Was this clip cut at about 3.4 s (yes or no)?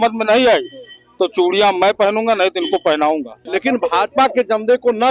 yes